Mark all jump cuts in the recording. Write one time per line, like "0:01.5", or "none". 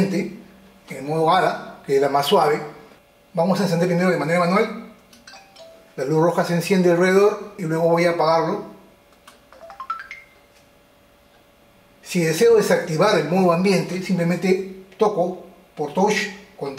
0:07.6